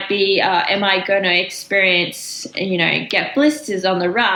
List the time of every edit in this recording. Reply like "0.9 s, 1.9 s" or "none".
none

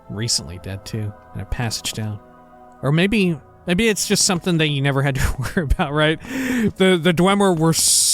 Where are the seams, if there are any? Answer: 3.5 s, 6.7 s

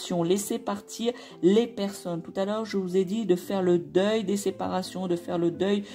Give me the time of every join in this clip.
none

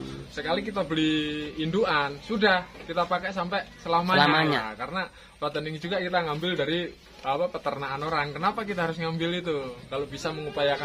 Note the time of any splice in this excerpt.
4.6 s

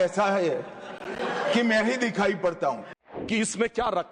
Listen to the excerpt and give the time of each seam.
3.0 s

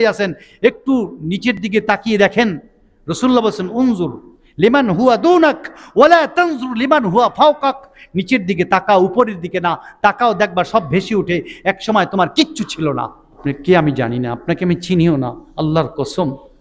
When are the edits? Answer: 13.3 s

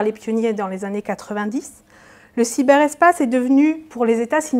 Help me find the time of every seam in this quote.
none

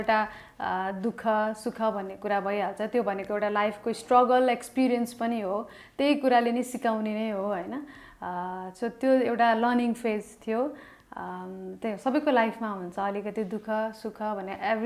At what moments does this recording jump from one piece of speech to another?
none

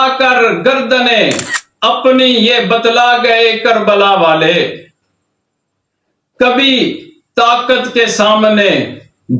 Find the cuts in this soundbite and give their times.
none

